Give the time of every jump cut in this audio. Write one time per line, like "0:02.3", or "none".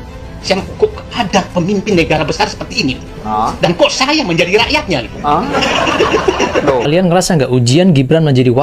0:06.9